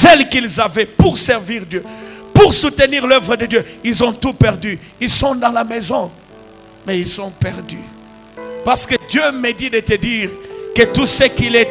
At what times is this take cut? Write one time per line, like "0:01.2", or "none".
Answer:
0:08.3